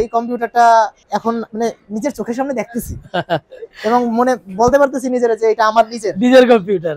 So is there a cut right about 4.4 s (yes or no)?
no